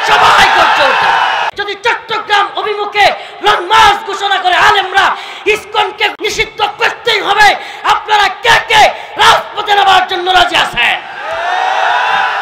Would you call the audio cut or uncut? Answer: cut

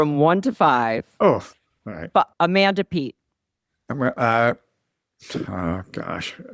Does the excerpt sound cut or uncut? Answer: cut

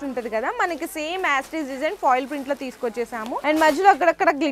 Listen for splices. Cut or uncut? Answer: cut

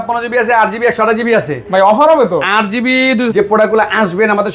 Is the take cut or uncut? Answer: cut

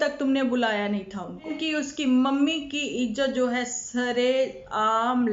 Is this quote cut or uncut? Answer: cut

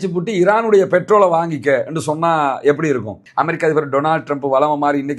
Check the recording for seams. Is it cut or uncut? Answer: cut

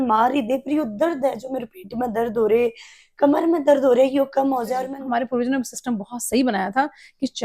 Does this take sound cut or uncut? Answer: cut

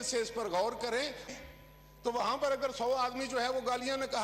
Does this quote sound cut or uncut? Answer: cut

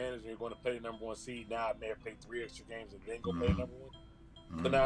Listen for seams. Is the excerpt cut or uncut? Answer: uncut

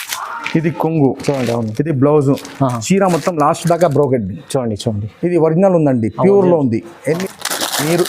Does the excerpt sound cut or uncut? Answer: cut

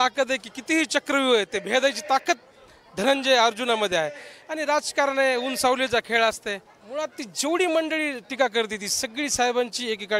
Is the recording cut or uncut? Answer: cut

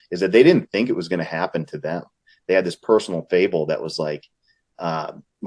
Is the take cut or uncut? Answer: uncut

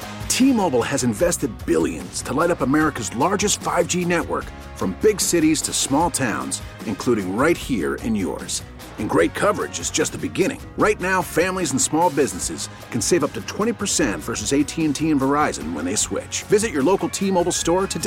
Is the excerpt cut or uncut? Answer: uncut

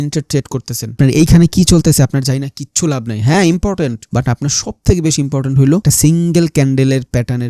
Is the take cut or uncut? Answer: cut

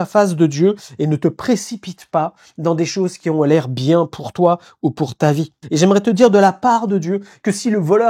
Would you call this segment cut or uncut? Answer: cut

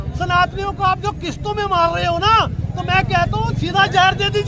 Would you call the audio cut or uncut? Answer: uncut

